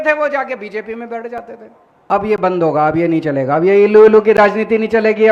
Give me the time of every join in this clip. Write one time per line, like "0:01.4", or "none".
0:02.1